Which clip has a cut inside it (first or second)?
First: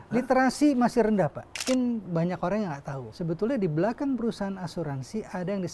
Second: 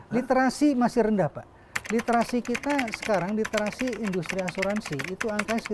first